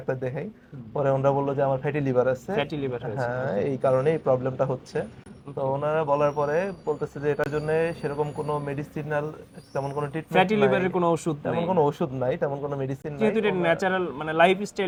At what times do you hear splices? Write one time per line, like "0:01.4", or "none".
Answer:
none